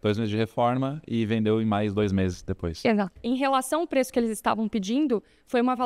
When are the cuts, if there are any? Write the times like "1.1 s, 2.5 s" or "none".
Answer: 3.2 s